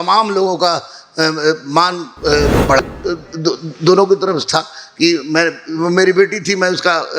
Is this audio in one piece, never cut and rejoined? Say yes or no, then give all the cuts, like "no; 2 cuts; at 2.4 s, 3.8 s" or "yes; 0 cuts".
no; 1 cut; at 2.8 s